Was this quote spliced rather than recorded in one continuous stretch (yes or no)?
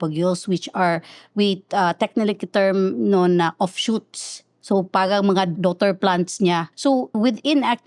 yes